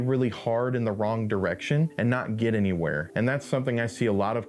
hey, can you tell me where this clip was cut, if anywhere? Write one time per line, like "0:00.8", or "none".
0:01.9
0:03.0